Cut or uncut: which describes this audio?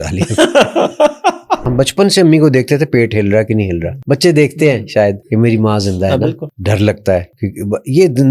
cut